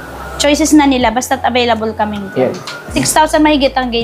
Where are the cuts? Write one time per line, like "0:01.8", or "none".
0:02.9